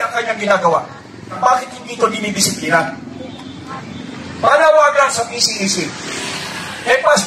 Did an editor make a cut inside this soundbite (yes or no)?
yes